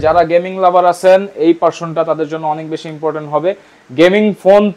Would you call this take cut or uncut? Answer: uncut